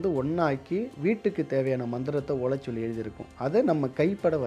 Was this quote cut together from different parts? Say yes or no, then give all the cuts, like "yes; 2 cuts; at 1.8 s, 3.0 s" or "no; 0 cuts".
yes; 1 cut; at 0.9 s